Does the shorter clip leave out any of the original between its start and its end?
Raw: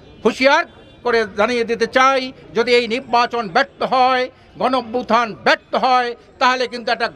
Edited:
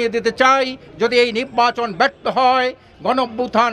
no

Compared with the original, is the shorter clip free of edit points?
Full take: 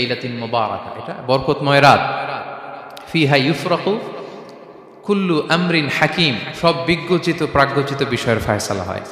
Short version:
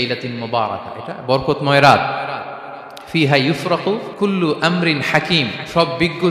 no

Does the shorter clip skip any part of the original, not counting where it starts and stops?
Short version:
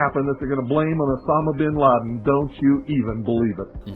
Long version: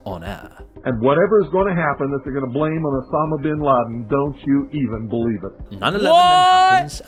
no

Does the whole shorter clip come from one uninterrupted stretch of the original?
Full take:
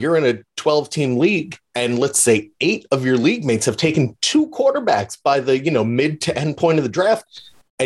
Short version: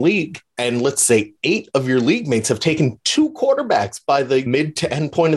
no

